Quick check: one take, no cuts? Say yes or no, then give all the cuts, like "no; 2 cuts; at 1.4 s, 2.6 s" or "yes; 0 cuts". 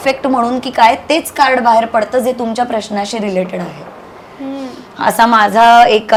yes; 0 cuts